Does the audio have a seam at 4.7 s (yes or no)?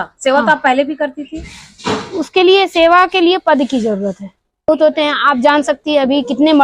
yes